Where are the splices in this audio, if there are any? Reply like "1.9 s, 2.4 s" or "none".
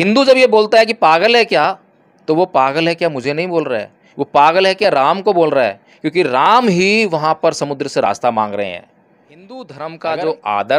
8.9 s